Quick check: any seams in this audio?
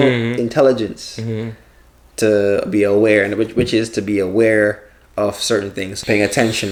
no; 0 cuts

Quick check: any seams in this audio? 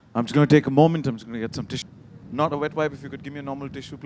yes; 1 cut; at 1.7 s

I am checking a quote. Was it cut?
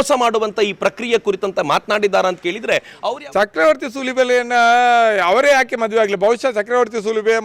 yes; 1 cut; at 2.9 s

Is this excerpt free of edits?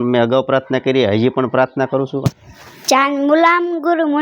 no; 1 cut; at 2.2 s

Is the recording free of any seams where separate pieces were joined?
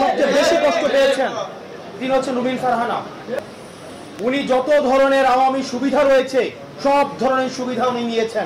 no; 1 cut; at 3.4 s

